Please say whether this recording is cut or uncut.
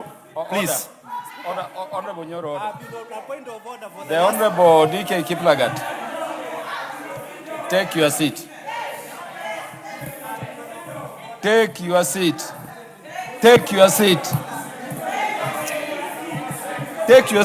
uncut